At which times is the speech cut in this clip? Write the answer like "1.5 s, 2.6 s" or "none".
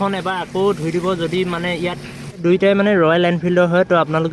2.4 s